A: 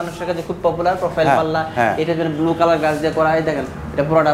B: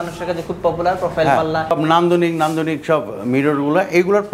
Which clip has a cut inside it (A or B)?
B